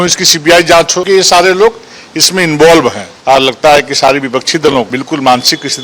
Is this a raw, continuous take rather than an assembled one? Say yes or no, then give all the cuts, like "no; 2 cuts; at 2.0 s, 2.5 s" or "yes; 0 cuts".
no; 3 cuts; at 1.0 s, 3.0 s, 5.0 s